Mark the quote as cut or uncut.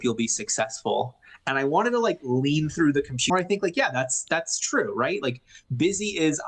cut